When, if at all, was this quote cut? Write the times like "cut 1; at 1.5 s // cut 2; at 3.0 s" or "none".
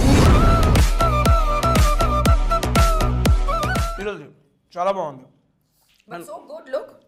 none